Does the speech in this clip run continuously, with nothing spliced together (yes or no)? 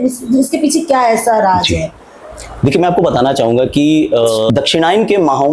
no